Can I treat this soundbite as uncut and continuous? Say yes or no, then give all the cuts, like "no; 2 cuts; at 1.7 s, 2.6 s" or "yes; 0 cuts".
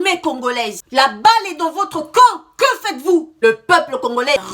no; 1 cut; at 3.3 s